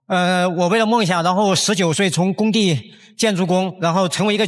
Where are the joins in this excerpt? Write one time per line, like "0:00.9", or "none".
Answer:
none